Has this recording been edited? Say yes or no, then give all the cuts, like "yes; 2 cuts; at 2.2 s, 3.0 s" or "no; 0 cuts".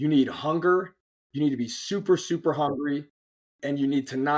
no; 0 cuts